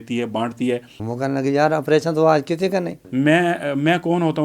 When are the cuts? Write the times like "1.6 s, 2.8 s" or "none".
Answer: 0.9 s, 3.0 s